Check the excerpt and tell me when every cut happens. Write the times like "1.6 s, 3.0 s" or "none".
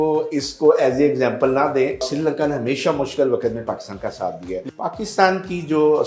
2.0 s, 4.6 s